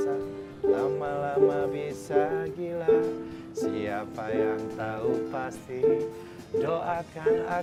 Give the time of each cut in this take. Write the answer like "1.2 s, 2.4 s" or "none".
none